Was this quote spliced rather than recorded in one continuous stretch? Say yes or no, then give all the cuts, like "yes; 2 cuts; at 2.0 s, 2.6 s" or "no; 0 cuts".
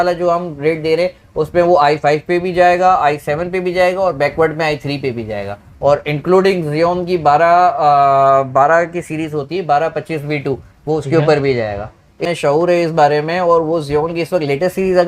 yes; 1 cut; at 12.2 s